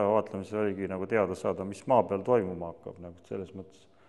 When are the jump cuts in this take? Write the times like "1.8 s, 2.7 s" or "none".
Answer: none